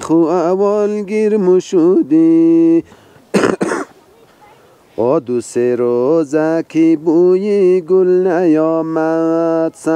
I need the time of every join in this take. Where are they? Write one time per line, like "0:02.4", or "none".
0:03.0